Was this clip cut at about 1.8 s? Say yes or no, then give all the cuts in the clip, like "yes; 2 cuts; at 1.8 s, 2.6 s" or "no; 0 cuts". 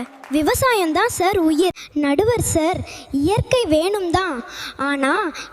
yes; 1 cut; at 1.8 s